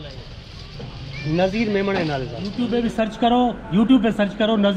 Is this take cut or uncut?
cut